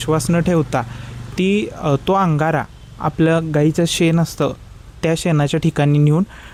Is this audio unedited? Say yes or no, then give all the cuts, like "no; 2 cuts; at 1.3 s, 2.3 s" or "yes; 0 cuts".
yes; 0 cuts